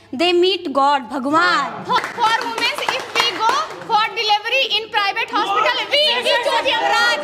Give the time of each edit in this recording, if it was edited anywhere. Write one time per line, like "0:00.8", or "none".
none